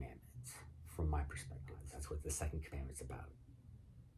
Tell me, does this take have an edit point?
yes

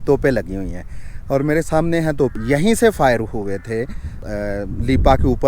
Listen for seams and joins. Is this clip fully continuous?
no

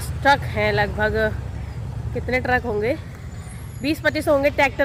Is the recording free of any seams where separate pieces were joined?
yes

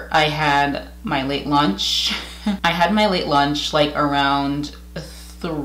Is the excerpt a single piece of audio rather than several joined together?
no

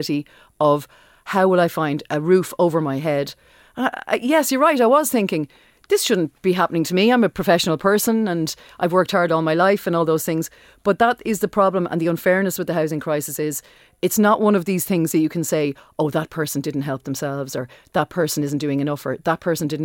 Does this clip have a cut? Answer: yes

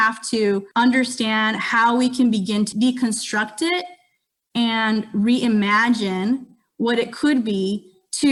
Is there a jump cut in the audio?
no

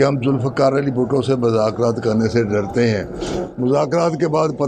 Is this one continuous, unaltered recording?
yes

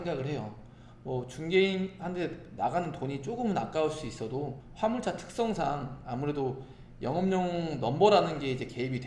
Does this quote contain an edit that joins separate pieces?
yes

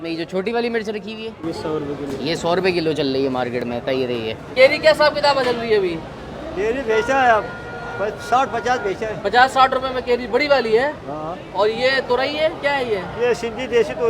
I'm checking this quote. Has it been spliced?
no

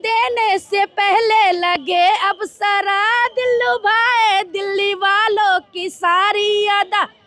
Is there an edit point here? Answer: no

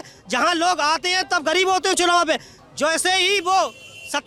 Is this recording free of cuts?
yes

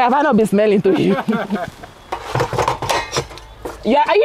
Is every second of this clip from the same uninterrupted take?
no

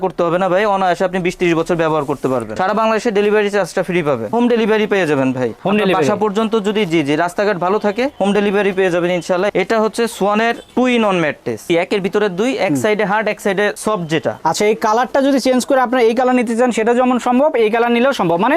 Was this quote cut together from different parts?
yes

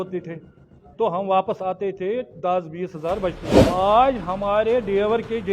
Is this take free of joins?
no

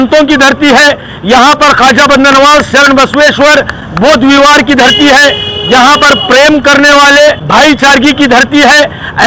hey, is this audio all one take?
yes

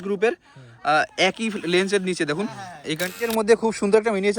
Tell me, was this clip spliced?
yes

